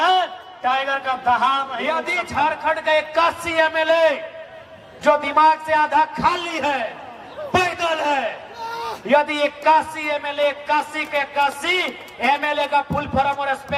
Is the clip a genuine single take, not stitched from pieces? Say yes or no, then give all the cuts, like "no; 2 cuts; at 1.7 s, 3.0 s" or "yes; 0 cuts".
no; 1 cut; at 2.0 s